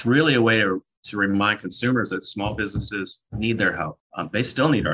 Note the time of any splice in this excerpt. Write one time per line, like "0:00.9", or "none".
0:03.2
0:04.0